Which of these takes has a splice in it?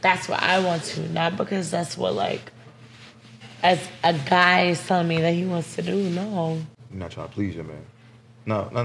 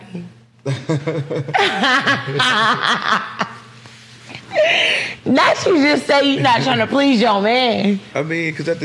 first; 1 cut; at 6.8 s

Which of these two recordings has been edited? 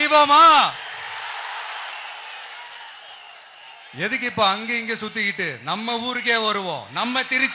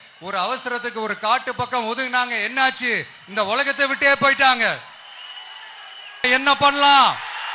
second; 1 cut; at 6.3 s

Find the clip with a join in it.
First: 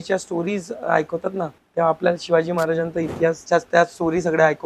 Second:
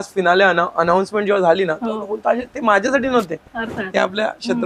first; 2 cuts; at 1.6 s, 3.4 s

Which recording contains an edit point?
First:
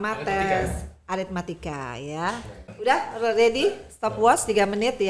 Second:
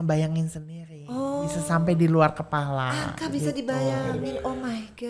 first; 1 cut; at 2.6 s

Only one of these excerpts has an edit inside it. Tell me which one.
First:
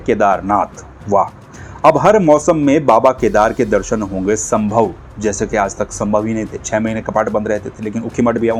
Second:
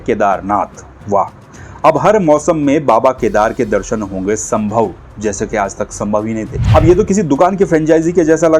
second; 1 cut; at 6.6 s

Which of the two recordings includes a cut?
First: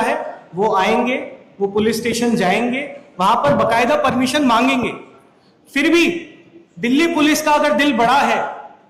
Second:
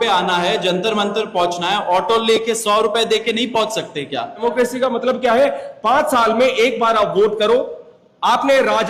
second; 1 cut; at 4.4 s

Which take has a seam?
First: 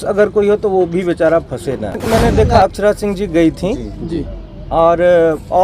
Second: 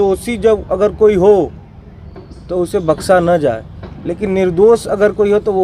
first; 1 cut; at 2.0 s

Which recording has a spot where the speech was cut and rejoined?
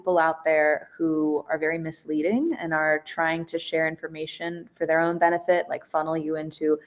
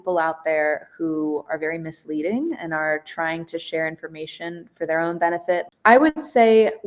second; 1 cut; at 5.7 s

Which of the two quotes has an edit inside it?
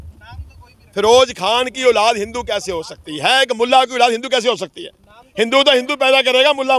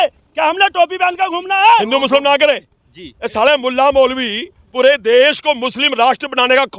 second; 1 cut; at 1.9 s

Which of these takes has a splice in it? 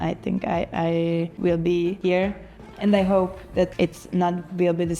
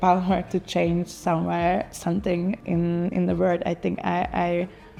first; 3 cuts; at 1.3 s, 2.3 s, 3.7 s

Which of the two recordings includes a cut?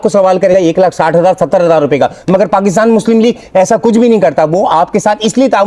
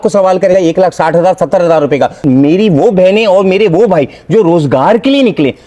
second; 1 cut; at 2.2 s

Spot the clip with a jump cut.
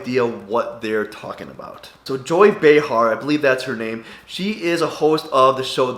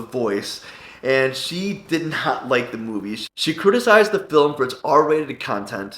second; 1 cut; at 3.2 s

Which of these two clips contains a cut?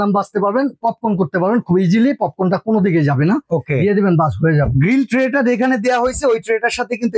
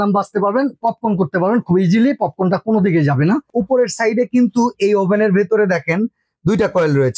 second; 1 cut; at 3.4 s

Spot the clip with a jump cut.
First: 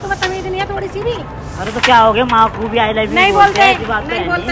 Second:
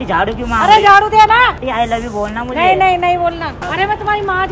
second; 2 cuts; at 1.6 s, 3.6 s

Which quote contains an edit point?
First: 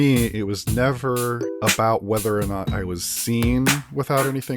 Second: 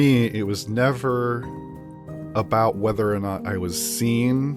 first; 1 cut; at 1.5 s

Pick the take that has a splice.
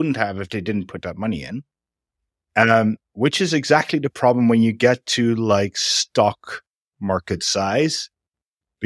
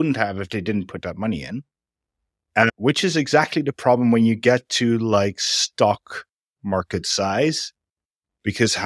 second; 1 cut; at 2.7 s

